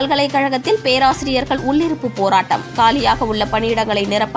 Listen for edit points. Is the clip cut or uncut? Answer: uncut